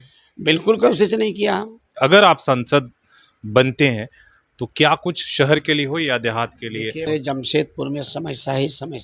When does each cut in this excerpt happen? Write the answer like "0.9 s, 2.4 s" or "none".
1.8 s, 7.0 s